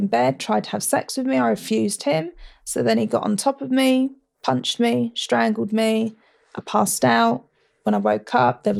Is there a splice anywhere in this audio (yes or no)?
no